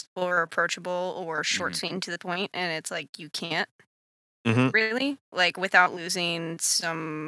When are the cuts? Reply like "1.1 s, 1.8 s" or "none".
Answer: none